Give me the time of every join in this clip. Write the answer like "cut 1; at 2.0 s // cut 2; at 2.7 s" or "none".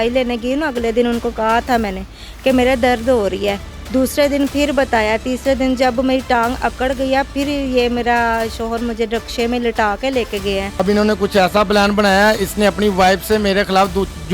cut 1; at 10.8 s